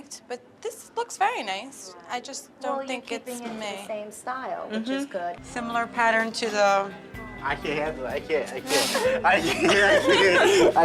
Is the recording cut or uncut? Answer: uncut